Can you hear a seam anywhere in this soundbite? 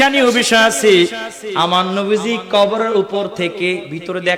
no; 0 cuts

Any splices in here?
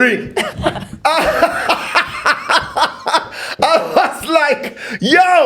no; 0 cuts

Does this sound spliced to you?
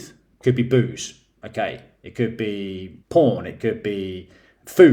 yes; 1 cut; at 2.9 s

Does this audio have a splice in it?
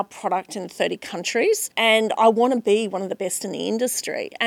yes; 1 cut; at 1.7 s

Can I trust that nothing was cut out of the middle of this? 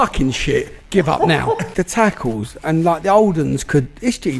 no; 1 cut; at 1.6 s

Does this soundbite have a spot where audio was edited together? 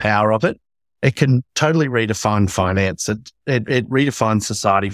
no; 0 cuts

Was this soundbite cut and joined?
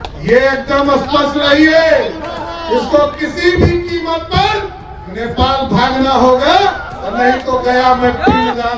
no; 0 cuts

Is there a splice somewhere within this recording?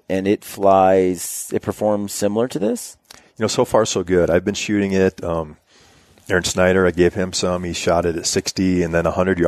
no; 0 cuts

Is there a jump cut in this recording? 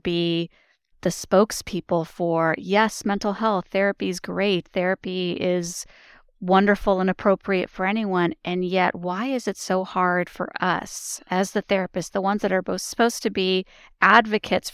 yes; 1 cut; at 1.0 s

